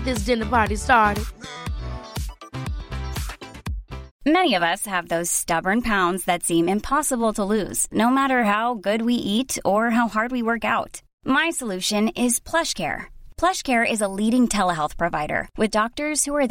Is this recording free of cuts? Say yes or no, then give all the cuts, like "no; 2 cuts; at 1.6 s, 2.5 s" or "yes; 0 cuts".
yes; 0 cuts